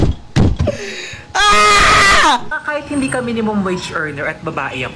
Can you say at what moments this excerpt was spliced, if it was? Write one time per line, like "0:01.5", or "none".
0:02.5